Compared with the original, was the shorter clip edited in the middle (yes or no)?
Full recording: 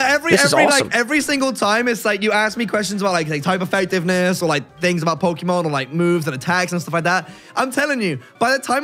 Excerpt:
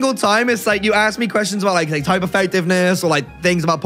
no